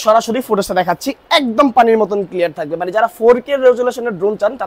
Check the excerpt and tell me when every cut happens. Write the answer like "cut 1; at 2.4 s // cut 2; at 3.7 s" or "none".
none